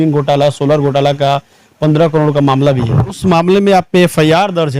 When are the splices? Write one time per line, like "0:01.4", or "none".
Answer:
0:03.2